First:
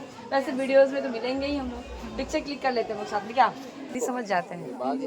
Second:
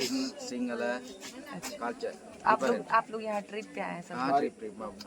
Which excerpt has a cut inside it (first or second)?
first